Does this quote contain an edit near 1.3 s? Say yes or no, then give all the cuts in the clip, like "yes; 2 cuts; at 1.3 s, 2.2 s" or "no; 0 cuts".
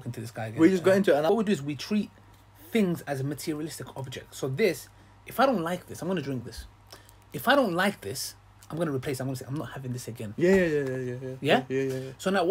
yes; 1 cut; at 1.3 s